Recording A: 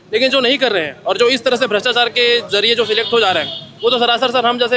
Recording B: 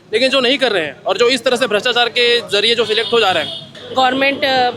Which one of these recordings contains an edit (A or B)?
B